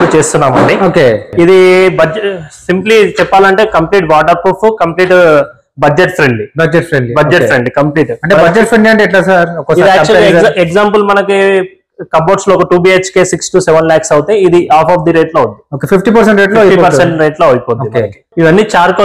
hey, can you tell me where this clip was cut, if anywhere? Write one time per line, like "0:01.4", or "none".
0:01.3
0:18.3